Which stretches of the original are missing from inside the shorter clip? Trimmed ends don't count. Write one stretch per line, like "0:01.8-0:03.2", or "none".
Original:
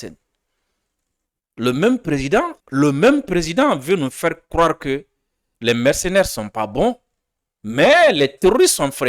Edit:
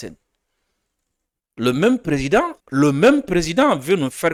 none